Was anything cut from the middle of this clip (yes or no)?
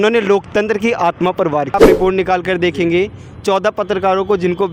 yes